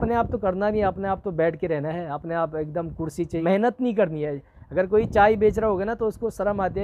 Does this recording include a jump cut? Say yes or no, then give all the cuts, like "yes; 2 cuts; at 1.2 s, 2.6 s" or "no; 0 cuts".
yes; 1 cut; at 3.4 s